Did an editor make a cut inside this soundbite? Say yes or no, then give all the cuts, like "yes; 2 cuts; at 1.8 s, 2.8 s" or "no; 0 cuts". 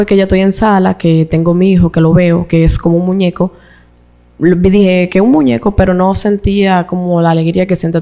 no; 0 cuts